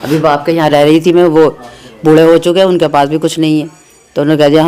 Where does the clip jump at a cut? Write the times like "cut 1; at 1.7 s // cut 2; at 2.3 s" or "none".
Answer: none